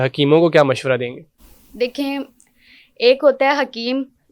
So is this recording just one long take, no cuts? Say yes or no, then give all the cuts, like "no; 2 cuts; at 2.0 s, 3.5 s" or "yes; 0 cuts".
yes; 0 cuts